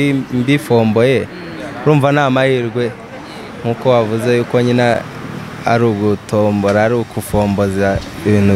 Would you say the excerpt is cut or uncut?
uncut